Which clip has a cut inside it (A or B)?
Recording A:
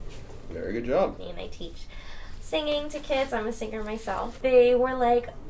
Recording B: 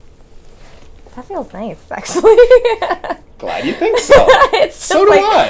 A